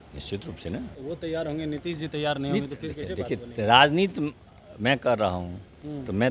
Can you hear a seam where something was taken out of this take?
yes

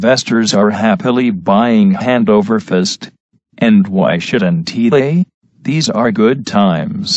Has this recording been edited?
no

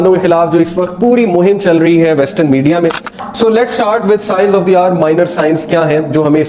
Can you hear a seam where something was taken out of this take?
yes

